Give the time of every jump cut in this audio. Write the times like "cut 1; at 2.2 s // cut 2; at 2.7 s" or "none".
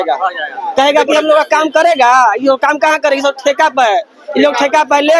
none